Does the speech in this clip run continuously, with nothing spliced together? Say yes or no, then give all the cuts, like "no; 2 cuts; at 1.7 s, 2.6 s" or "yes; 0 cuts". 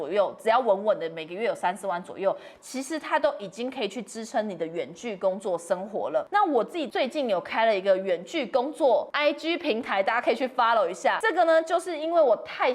no; 3 cuts; at 6.6 s, 9.1 s, 11.2 s